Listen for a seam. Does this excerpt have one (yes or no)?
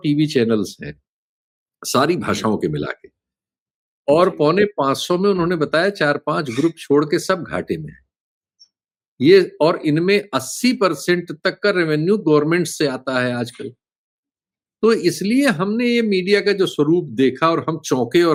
no